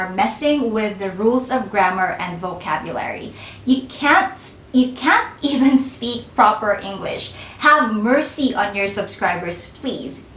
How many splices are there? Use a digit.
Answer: 0